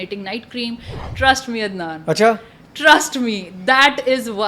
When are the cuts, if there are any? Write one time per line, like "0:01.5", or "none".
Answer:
0:00.9